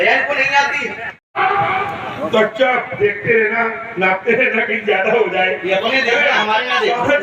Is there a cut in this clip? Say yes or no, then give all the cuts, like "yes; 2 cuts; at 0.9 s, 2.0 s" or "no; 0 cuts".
yes; 1 cut; at 1.3 s